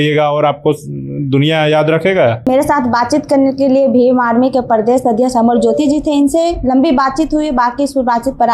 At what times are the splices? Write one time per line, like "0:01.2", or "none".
none

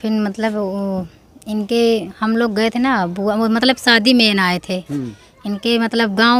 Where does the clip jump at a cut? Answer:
none

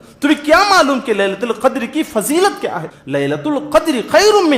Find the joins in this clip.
0:02.9

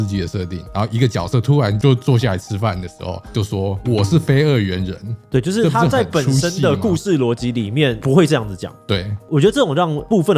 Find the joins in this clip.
0:03.3
0:05.1
0:08.0

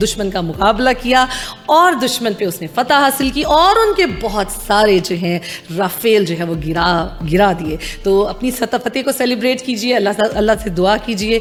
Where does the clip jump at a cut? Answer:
none

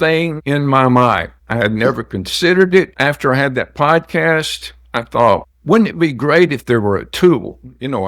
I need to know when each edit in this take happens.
none

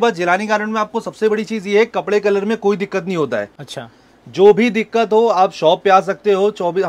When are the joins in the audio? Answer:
none

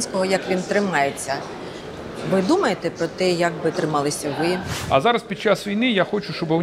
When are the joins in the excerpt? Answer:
0:04.7

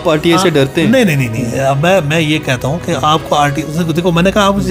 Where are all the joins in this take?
none

